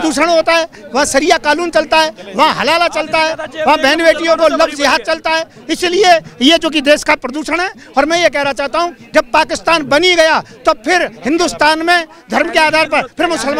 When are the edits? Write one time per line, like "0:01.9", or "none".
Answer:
none